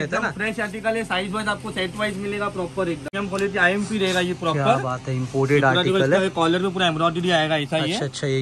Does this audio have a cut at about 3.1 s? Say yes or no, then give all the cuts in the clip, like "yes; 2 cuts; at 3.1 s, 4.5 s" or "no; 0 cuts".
yes; 1 cut; at 3.1 s